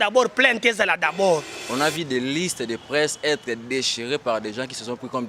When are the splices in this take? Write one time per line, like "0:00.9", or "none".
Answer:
0:01.6